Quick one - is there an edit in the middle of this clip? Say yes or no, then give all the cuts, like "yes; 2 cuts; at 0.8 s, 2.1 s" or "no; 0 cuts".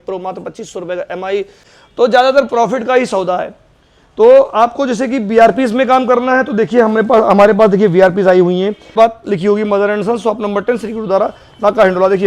yes; 2 cuts; at 1.6 s, 8.9 s